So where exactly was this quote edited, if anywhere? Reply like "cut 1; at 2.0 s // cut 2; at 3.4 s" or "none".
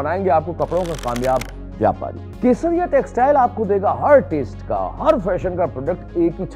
cut 1; at 2.2 s